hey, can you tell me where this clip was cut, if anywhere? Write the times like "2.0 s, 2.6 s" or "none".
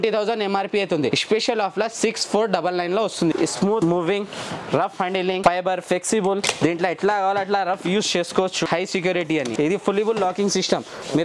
3.3 s, 8.7 s, 9.5 s